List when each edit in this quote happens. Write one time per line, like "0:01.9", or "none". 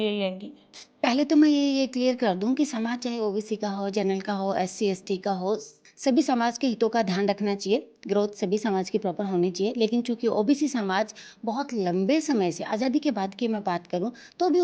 0:05.8